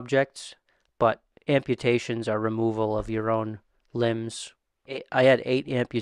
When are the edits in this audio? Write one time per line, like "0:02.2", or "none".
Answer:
none